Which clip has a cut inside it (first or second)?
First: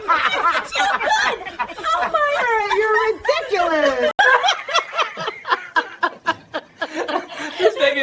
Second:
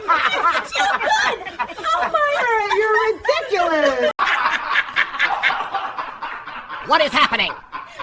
first